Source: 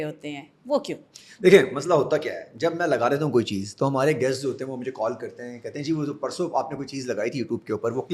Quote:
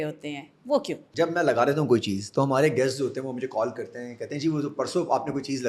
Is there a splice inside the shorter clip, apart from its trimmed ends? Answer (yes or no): yes